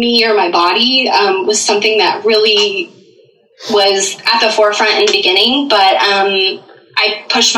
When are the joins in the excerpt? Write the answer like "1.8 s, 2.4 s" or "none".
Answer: none